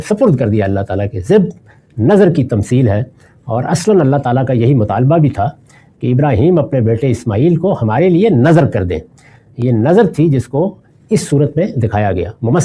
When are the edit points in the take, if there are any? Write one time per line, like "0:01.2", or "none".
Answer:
none